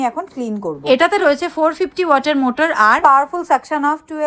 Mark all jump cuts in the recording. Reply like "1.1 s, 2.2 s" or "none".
none